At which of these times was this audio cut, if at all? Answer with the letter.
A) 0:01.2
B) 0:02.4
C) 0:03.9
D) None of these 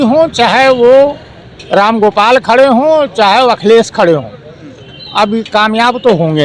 D